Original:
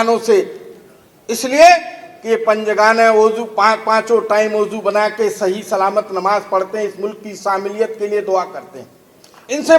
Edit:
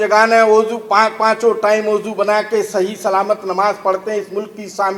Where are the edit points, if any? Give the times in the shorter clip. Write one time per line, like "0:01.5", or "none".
none